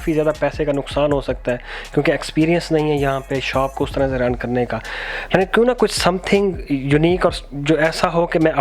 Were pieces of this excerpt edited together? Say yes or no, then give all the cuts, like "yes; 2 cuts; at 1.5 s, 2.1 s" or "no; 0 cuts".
no; 0 cuts